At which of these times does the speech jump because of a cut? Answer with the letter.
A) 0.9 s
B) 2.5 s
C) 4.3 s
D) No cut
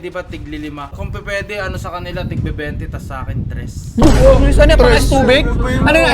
A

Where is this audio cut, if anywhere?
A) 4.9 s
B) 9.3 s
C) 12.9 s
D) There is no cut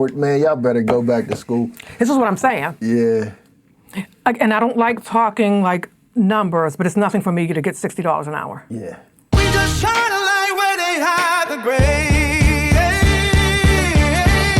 B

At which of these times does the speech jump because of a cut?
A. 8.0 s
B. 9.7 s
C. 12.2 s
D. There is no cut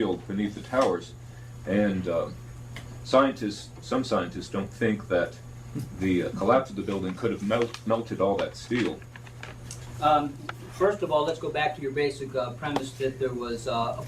B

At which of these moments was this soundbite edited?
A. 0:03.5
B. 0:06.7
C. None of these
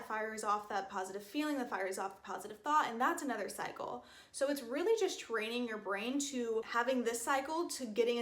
B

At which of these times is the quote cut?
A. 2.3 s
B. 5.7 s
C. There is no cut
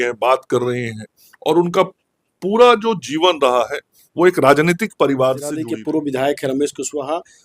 B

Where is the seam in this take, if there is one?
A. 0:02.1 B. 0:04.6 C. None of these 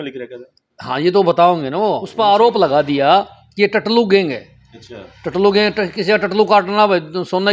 A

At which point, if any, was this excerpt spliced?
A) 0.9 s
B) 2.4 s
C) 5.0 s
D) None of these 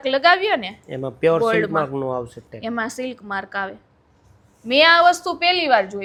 D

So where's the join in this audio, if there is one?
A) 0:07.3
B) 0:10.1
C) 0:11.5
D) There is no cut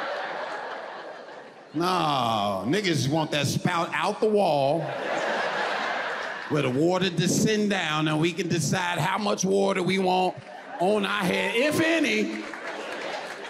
D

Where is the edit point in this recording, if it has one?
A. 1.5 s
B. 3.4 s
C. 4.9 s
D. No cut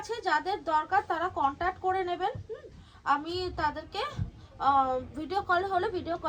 D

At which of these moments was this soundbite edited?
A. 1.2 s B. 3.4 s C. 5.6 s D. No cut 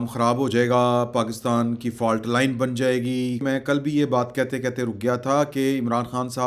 B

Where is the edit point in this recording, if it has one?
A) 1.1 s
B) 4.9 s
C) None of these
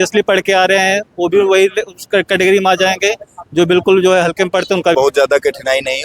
B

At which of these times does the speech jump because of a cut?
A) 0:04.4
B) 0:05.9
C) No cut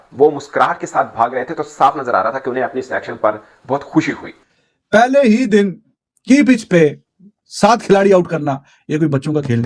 A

